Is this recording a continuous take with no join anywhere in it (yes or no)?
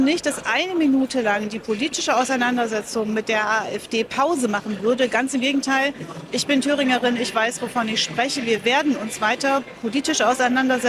yes